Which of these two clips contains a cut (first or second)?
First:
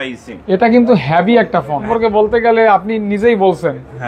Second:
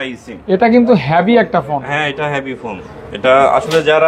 first